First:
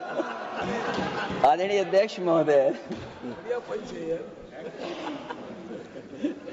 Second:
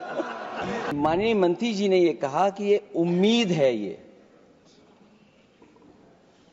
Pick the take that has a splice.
second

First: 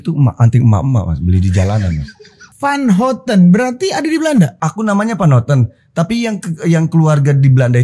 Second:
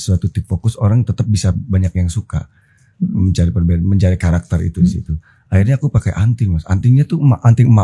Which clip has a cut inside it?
first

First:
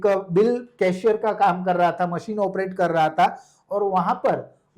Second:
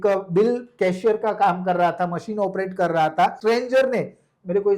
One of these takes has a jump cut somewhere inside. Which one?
second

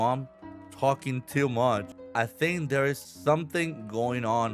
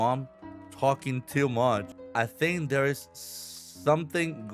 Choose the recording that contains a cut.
first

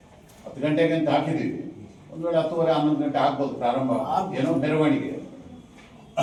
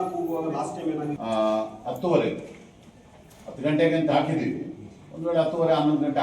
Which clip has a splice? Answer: second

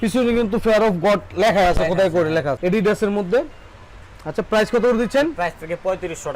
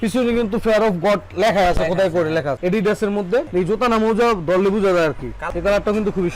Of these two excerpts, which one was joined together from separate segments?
second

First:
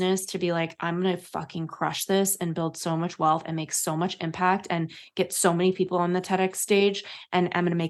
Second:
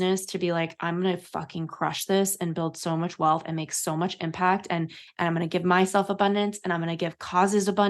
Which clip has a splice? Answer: second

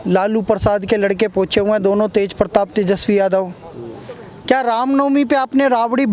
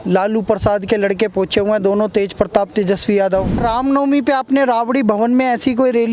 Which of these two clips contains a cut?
second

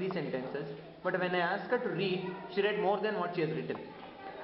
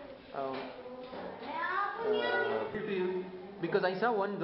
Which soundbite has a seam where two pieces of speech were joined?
second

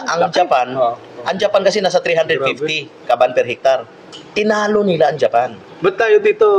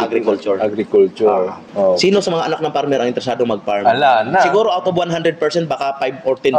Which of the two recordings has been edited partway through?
second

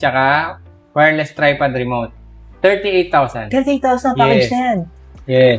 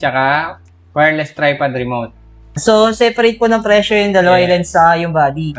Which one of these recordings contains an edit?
second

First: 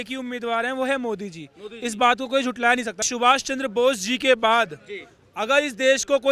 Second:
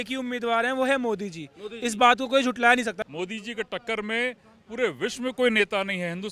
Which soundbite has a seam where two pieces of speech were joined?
second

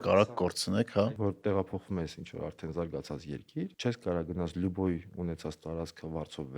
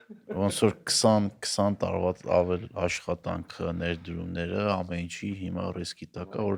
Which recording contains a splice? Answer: first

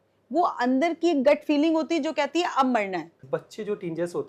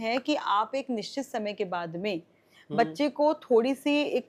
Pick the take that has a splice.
first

